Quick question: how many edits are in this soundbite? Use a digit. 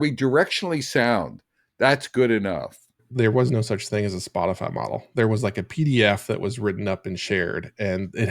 1